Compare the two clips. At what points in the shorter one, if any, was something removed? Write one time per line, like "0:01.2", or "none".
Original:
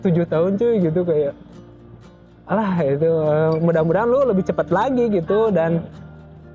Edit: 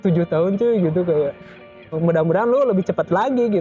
0:02.0